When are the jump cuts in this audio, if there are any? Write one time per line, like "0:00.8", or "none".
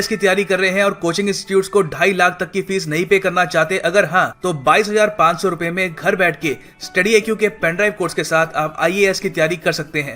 none